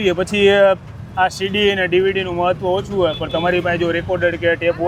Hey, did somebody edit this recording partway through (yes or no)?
no